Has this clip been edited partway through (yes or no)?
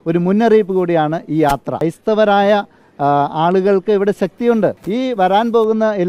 yes